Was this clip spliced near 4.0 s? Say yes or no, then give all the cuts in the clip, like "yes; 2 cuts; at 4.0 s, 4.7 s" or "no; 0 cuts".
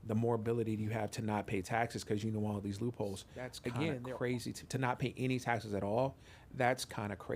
yes; 1 cut; at 4.0 s